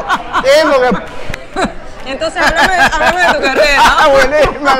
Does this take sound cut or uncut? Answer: cut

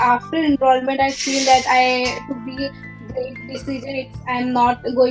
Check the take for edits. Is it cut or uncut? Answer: uncut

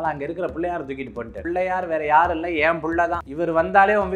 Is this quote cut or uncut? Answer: cut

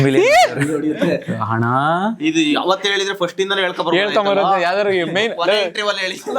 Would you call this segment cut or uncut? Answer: uncut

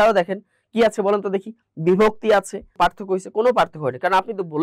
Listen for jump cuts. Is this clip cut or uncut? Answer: cut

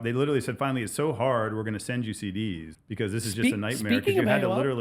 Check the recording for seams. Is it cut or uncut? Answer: cut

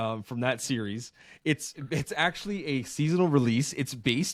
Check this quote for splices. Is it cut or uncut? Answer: uncut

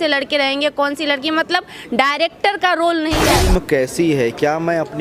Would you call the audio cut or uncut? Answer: cut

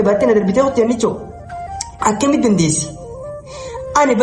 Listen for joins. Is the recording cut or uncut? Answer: uncut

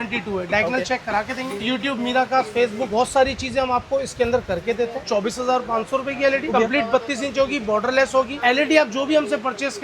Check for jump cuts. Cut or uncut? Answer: cut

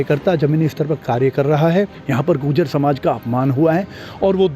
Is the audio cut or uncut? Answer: cut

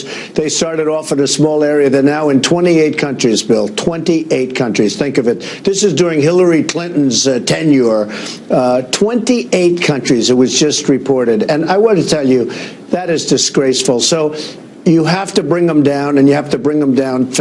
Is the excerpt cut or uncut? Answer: uncut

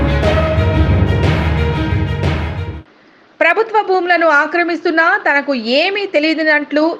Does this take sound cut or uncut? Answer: cut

